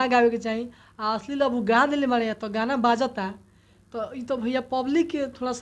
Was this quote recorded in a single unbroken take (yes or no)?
yes